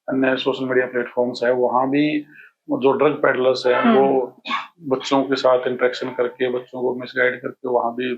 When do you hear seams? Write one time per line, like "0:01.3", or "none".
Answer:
none